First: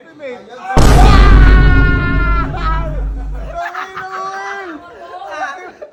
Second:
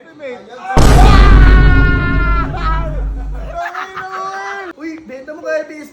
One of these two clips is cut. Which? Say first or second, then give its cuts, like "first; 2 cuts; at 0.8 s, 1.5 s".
second; 1 cut; at 4.7 s